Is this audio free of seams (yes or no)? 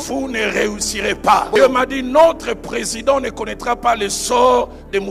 no